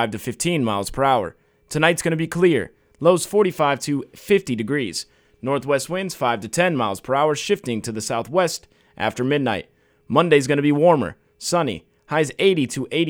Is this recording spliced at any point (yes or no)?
no